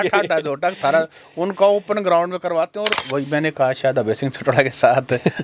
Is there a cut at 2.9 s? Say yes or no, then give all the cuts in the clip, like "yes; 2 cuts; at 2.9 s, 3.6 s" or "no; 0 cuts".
yes; 1 cut; at 2.9 s